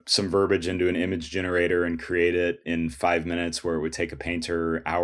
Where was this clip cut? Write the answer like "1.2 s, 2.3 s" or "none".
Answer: none